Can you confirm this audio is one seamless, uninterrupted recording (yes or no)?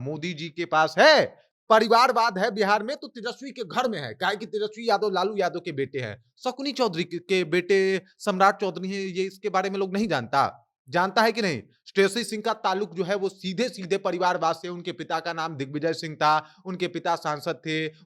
no